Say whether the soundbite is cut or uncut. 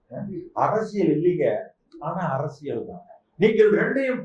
uncut